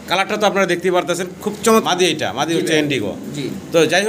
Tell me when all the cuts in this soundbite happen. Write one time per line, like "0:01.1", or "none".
0:01.8